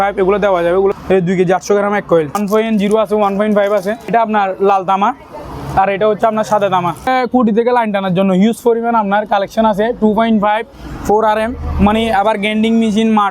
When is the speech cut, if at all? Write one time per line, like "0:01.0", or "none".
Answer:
0:01.0
0:02.4
0:04.1
0:07.1